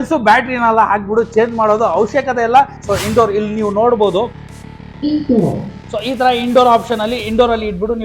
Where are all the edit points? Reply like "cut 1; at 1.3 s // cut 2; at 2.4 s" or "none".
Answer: cut 1; at 2.7 s